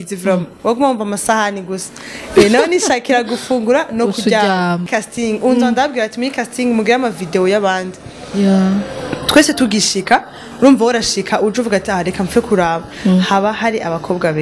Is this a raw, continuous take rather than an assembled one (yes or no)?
no